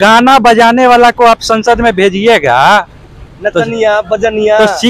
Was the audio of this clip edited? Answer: no; 0 cuts

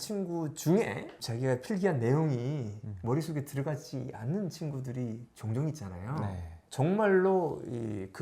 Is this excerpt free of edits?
no; 1 cut; at 6.5 s

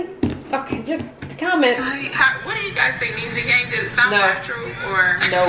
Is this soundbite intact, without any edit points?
no; 1 cut; at 2.2 s

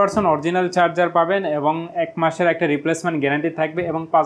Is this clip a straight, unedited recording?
yes; 0 cuts

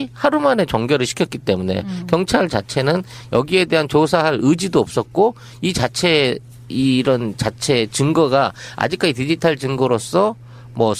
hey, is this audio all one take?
no; 1 cut; at 7.0 s

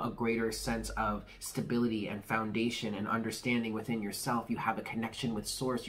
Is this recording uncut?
yes; 0 cuts

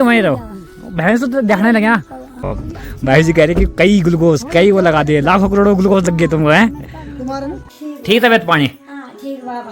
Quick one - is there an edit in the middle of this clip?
yes; 2 cuts; at 2.6 s, 7.7 s

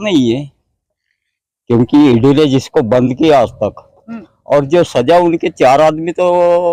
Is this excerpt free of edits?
yes; 0 cuts

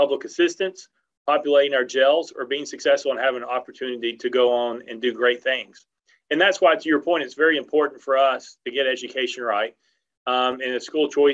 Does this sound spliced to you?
no; 0 cuts

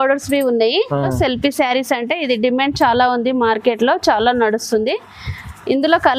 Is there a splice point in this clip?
yes; 1 cut; at 1.1 s

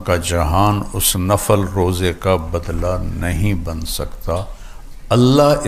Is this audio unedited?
yes; 0 cuts

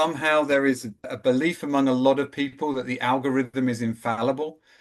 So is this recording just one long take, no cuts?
no; 1 cut; at 1.0 s

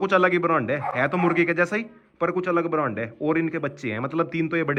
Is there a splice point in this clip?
no; 0 cuts

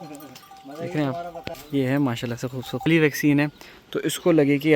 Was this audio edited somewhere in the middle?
yes; 1 cut; at 2.9 s

